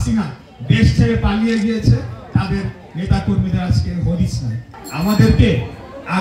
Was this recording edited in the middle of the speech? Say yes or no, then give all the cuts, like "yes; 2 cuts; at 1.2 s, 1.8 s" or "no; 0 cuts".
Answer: no; 0 cuts